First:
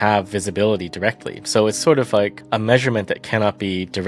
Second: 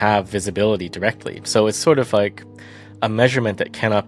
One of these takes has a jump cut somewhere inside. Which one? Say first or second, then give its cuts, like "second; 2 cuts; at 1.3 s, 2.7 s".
first; 1 cut; at 2.4 s